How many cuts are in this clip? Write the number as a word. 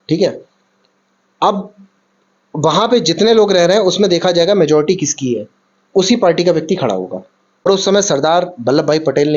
one